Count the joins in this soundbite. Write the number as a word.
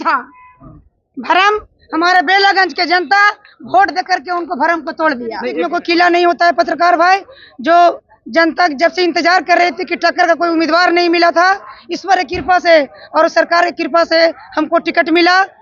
one